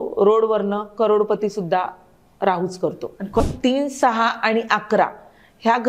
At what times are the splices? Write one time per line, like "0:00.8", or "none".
0:03.4